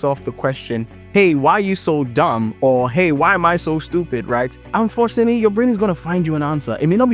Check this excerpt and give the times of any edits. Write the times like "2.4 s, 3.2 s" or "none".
4.6 s